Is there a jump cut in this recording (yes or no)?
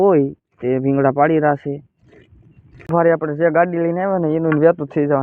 yes